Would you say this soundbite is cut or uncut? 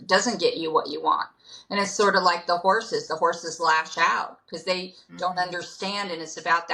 uncut